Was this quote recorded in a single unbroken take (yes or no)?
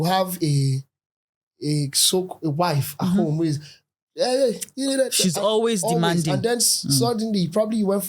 yes